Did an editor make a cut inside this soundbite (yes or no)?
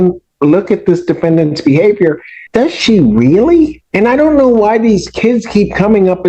yes